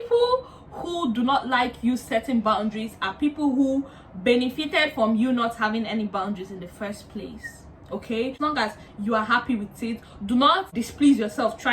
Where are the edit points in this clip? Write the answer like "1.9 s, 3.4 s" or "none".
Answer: 8.4 s, 10.8 s